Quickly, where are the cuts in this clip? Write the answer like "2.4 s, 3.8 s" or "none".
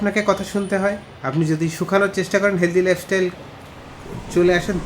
none